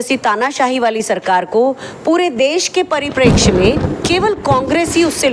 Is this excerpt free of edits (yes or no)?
yes